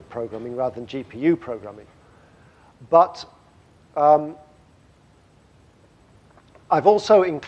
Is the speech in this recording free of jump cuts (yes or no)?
no